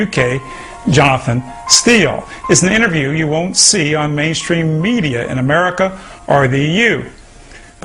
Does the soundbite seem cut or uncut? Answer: uncut